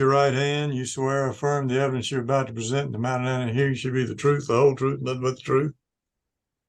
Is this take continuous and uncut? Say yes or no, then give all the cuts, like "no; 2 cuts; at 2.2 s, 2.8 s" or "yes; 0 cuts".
yes; 0 cuts